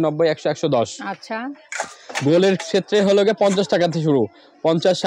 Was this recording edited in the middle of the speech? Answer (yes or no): no